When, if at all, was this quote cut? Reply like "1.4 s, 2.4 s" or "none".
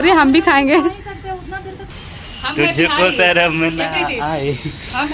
1.9 s